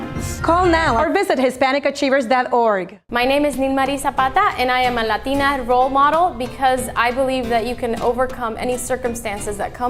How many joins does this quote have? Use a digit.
1